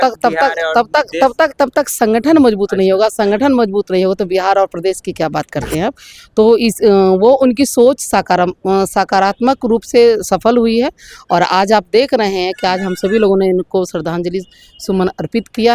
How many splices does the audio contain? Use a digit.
0